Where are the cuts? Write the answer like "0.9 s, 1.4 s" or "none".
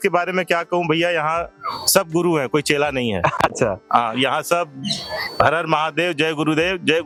none